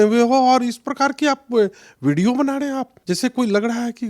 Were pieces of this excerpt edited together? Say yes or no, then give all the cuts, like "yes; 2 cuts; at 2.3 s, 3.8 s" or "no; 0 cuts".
yes; 1 cut; at 2.9 s